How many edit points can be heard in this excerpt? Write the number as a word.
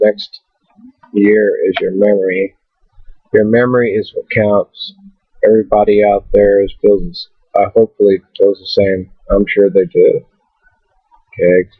one